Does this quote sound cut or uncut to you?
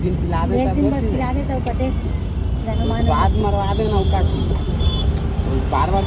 uncut